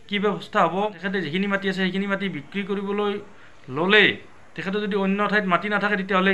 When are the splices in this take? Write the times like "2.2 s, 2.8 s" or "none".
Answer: 1.0 s